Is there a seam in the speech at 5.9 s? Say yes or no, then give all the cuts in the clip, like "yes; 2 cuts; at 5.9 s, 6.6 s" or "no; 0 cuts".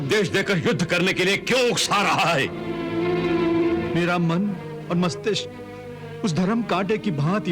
no; 1 cut; at 3.9 s